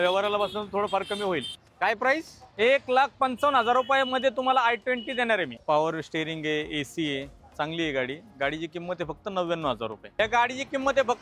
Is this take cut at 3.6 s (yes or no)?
no